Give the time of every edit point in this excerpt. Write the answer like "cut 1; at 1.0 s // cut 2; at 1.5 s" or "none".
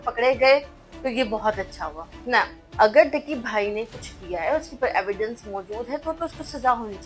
cut 1; at 2.6 s